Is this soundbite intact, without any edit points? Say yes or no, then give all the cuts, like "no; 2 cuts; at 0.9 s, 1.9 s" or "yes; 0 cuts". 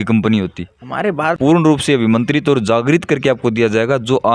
no; 1 cut; at 1.4 s